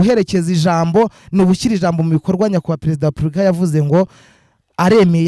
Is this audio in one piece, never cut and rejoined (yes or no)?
yes